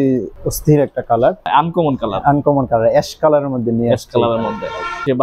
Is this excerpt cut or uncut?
cut